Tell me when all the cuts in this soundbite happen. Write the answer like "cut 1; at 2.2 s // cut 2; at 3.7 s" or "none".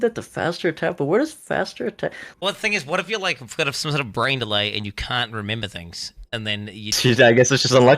cut 1; at 2.2 s // cut 2; at 6.9 s